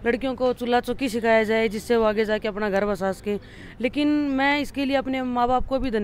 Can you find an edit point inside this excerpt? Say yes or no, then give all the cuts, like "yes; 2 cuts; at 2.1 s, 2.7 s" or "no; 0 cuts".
no; 0 cuts